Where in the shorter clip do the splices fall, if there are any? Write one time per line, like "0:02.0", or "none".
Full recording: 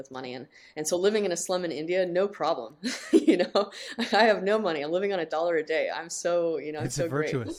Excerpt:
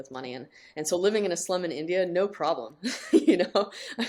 none